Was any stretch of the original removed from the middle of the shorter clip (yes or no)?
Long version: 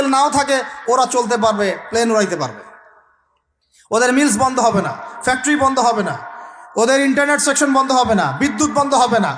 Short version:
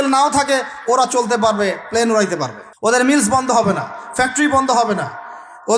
yes